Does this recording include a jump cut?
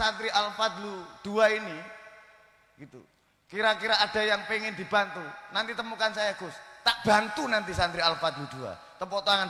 no; 0 cuts

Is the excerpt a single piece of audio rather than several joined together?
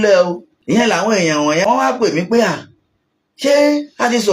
no; 2 cuts; at 0.8 s, 1.6 s

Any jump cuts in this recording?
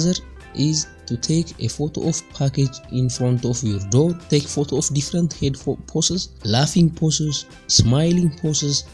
yes; 2 cuts; at 4.2 s, 6.3 s

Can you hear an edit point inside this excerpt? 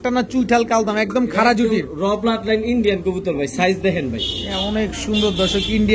no; 0 cuts

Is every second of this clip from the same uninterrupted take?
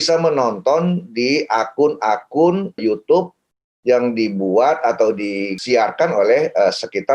no; 2 cuts; at 2.8 s, 5.5 s

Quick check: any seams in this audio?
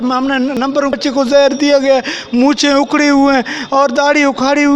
yes; 1 cut; at 0.9 s

